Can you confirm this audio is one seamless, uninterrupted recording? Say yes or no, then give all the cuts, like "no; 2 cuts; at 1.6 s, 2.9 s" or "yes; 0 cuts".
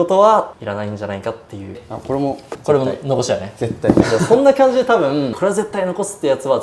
no; 2 cuts; at 1.9 s, 5.3 s